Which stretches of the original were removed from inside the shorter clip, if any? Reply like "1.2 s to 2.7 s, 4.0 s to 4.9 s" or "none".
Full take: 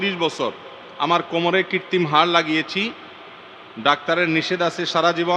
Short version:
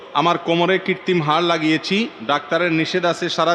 3.0 s to 3.7 s